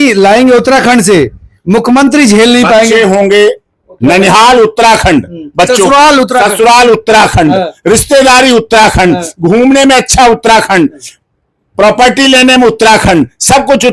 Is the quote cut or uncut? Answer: uncut